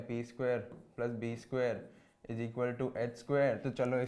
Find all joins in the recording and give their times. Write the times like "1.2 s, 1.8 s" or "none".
none